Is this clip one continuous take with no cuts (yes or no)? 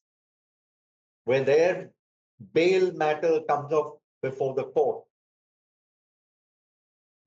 yes